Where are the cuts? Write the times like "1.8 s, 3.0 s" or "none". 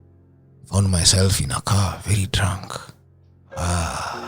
none

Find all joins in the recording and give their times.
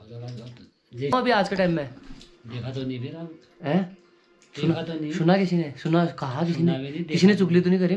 1.1 s

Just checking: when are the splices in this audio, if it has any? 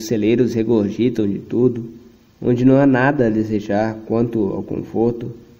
none

